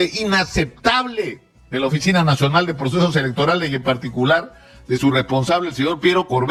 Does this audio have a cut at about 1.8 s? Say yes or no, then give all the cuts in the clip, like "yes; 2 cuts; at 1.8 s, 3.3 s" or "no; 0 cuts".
no; 0 cuts